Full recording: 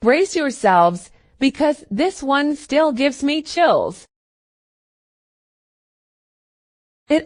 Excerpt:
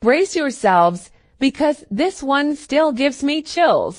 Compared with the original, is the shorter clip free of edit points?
yes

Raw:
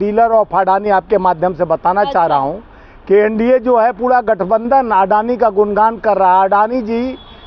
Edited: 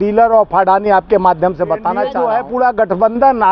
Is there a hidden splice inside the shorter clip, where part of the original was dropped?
yes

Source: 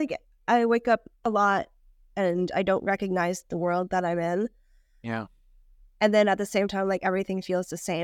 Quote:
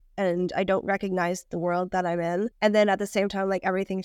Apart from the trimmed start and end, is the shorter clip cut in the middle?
yes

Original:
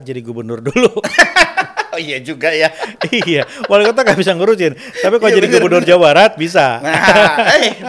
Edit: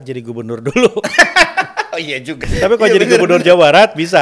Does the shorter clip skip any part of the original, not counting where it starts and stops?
yes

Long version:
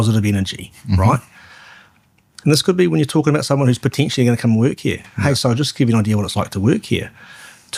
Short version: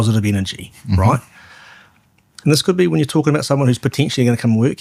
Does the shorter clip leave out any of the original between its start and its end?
no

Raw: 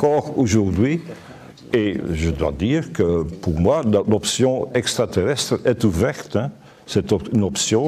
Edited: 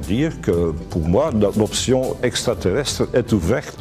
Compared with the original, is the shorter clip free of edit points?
yes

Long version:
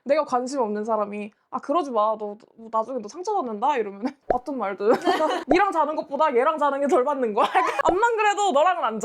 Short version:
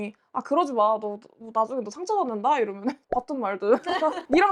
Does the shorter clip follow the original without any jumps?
yes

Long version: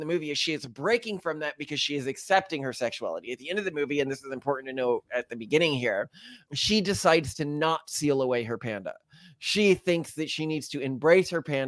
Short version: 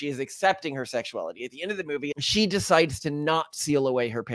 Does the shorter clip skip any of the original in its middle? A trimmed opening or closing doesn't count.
yes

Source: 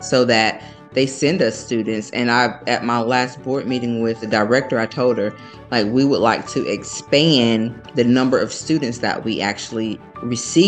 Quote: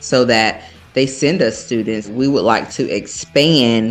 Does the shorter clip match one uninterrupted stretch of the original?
no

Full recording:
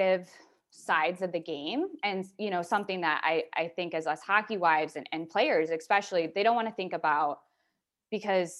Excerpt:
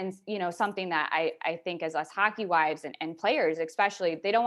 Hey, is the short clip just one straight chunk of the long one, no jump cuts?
yes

